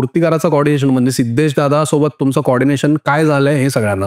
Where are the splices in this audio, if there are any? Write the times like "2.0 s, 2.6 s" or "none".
none